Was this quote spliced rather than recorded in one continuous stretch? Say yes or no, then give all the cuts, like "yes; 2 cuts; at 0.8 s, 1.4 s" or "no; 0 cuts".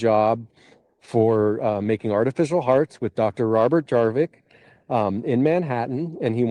no; 0 cuts